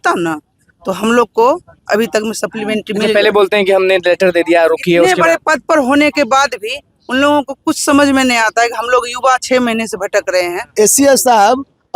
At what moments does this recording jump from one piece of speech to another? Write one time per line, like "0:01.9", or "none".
0:10.7